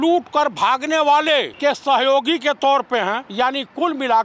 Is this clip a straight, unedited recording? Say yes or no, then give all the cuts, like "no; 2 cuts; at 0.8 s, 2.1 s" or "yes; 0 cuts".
no; 2 cuts; at 1.5 s, 3.2 s